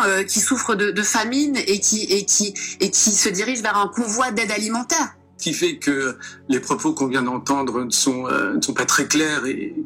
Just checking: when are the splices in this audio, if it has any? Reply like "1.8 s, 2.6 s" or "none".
5.3 s